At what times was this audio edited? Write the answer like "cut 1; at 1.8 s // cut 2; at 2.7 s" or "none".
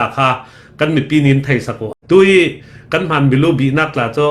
cut 1; at 1.8 s